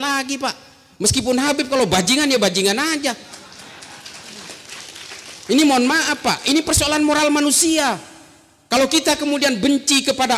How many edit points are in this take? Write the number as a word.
zero